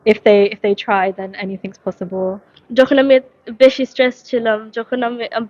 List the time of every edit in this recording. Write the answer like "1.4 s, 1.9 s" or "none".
2.5 s